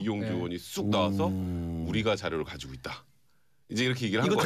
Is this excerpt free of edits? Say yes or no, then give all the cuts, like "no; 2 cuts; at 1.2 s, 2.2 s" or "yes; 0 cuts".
no; 1 cut; at 2.5 s